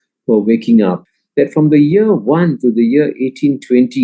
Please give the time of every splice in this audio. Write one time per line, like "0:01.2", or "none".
0:01.0